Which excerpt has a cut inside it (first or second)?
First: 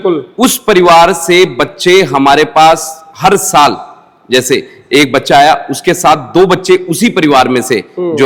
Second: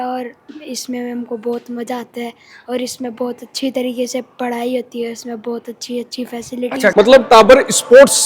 second